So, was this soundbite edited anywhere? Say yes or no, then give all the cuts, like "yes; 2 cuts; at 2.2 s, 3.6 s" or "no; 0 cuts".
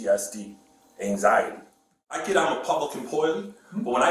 yes; 1 cut; at 2.2 s